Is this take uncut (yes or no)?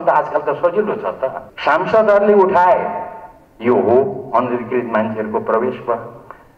no